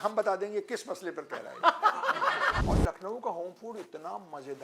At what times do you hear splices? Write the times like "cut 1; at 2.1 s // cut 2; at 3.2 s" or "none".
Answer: cut 1; at 2.6 s

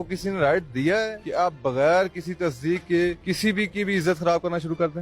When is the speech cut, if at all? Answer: cut 1; at 1.2 s // cut 2; at 3.2 s

